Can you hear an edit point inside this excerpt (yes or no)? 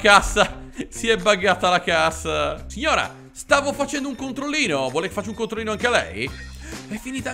yes